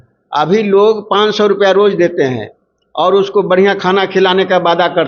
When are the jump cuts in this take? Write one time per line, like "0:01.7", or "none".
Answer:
none